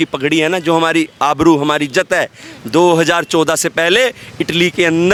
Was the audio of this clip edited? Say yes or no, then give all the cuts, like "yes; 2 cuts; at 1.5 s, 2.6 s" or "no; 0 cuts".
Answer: no; 0 cuts